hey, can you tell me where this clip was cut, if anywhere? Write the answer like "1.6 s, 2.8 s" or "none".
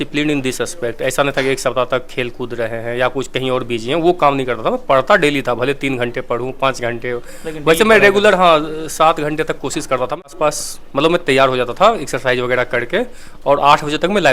10.3 s